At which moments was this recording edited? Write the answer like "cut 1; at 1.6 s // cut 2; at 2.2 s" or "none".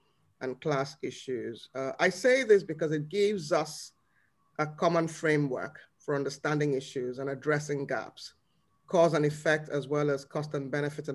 none